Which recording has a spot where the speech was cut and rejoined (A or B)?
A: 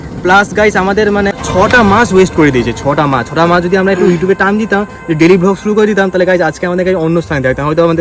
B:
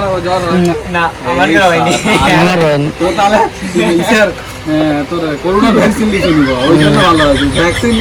A